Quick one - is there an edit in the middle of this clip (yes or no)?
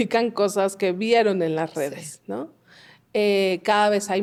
no